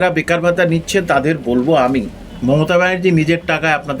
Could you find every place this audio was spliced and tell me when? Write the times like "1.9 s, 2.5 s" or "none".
2.2 s